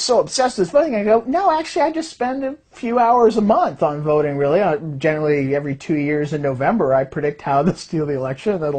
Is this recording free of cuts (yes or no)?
no